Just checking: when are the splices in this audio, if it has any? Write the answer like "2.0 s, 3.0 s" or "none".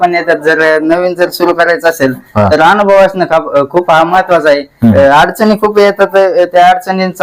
none